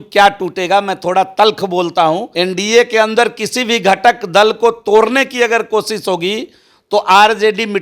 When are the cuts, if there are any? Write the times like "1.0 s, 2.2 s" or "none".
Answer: 2.3 s